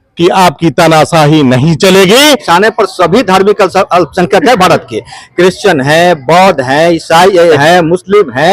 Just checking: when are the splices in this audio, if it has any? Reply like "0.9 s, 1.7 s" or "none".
2.4 s, 7.6 s